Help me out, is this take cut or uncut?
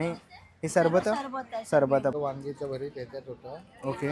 cut